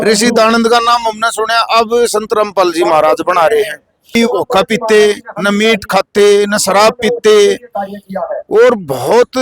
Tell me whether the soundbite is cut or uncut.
cut